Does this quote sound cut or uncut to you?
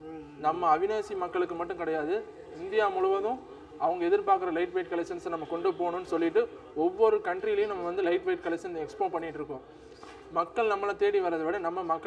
uncut